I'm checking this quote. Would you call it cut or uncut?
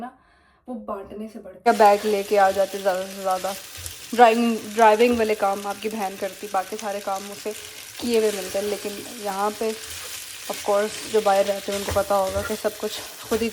cut